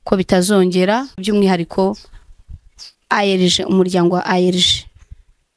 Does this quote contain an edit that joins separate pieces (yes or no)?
yes